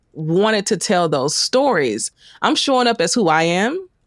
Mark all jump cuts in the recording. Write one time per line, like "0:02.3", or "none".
0:02.1